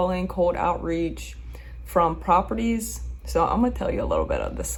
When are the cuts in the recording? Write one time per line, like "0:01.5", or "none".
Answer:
none